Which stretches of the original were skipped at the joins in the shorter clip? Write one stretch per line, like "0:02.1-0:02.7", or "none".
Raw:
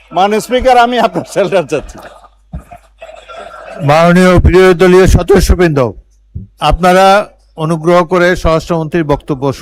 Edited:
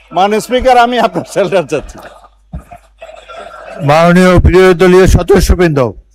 none